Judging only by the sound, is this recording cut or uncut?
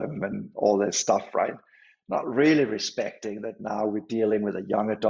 uncut